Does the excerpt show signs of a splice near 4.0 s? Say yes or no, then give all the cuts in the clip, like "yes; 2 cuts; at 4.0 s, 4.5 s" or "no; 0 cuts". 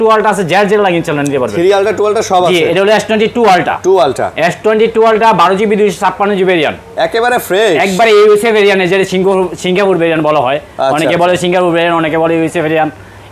no; 0 cuts